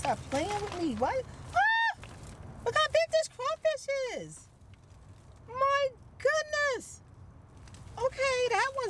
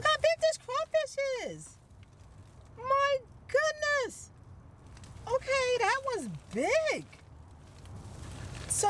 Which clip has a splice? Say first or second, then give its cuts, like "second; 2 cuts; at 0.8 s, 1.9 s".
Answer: second; 1 cut; at 7.9 s